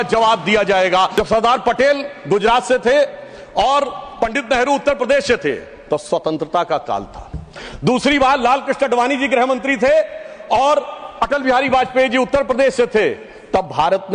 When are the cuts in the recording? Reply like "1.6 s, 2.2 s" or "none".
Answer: 1.1 s